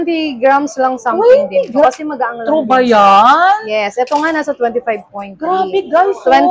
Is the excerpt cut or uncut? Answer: uncut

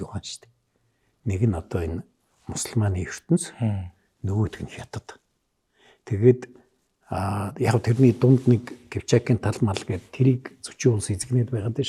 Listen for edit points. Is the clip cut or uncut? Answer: uncut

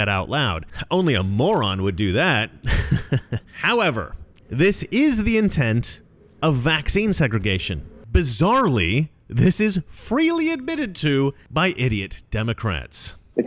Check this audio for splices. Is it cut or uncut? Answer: uncut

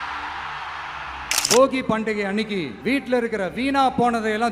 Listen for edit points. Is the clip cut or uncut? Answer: cut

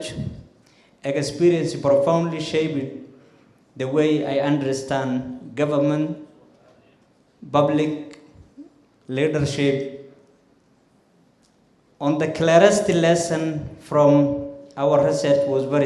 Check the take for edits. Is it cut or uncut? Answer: uncut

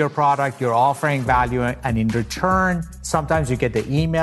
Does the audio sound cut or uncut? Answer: uncut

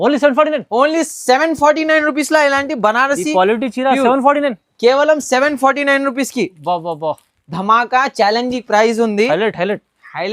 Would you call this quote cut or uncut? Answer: uncut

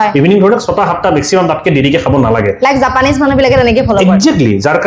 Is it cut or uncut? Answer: uncut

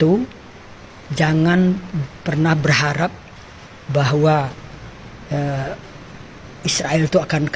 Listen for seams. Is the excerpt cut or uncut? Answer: uncut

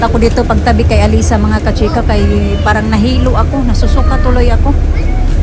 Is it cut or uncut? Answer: uncut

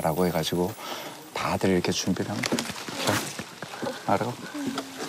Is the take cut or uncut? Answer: uncut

